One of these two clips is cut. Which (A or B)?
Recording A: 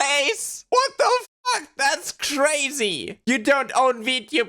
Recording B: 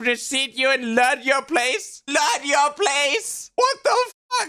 A